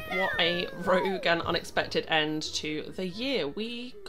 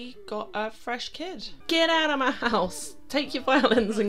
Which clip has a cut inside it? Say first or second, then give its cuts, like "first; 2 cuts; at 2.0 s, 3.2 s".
second; 1 cut; at 1.6 s